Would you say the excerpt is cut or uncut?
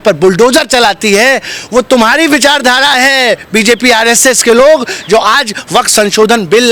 uncut